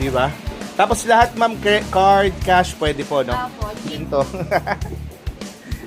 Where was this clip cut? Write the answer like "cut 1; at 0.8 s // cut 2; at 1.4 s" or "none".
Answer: cut 1; at 4.0 s